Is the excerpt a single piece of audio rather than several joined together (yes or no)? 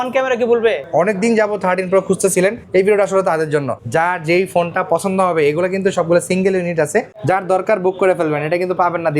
no